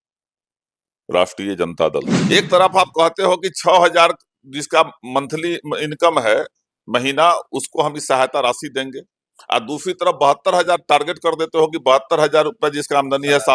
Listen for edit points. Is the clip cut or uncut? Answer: cut